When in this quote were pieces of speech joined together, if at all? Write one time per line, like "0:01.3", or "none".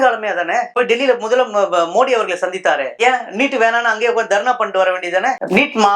none